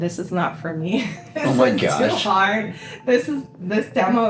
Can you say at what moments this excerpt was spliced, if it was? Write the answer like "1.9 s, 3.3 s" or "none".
none